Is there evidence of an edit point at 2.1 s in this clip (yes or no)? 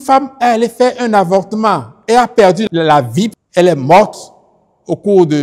no